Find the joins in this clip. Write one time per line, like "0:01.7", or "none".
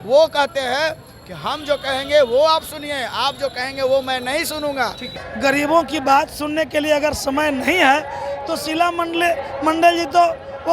0:05.1

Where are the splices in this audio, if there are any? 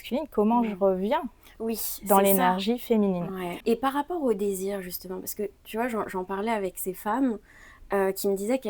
0:03.6

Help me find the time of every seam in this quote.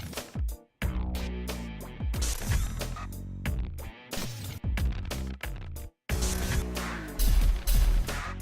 0:04.0

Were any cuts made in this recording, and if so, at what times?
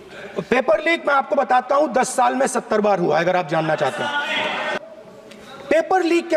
none

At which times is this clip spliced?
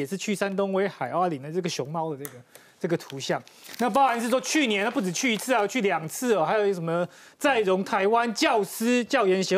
none

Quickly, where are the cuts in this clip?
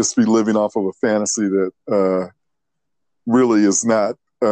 none

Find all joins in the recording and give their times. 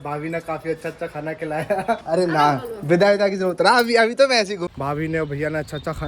0:02.0
0:04.6

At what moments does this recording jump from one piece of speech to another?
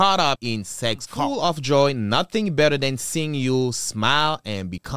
0:01.1

